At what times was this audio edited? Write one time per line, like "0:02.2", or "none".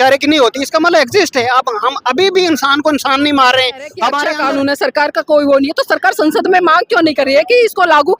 0:03.9